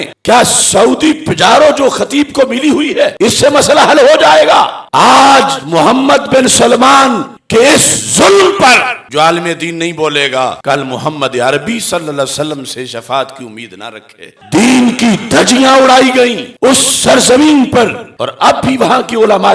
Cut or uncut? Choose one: uncut